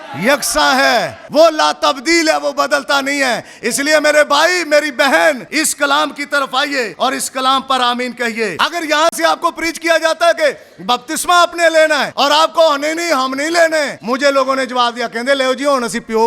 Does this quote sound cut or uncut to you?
cut